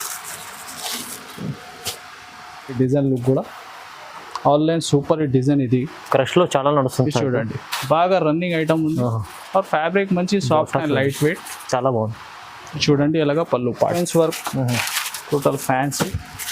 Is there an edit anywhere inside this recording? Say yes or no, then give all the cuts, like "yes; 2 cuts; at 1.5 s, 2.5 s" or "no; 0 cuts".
yes; 2 cuts; at 2.7 s, 14.0 s